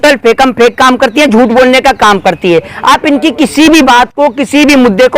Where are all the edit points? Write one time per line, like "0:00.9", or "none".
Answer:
none